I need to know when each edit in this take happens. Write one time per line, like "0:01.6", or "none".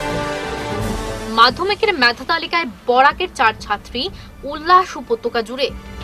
none